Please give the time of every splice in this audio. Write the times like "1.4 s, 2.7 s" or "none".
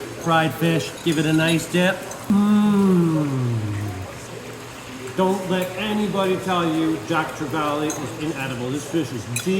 0.9 s, 2.3 s, 4.3 s